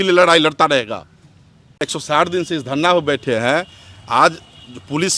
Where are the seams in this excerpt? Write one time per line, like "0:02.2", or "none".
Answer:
0:01.8